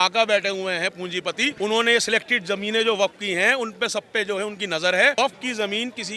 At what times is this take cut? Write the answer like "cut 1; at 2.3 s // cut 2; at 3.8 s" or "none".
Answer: cut 1; at 1.5 s // cut 2; at 5.1 s